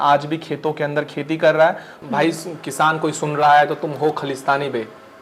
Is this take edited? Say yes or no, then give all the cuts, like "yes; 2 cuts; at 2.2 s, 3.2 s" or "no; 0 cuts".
yes; 1 cut; at 2.0 s